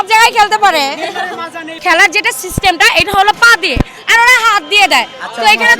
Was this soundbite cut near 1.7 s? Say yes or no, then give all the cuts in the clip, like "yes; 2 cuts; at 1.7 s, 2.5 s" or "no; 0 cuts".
yes; 1 cut; at 1.7 s